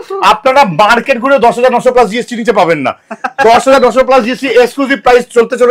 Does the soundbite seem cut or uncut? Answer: uncut